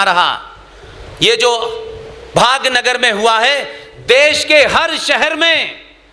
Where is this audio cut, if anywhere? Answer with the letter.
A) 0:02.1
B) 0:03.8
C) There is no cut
C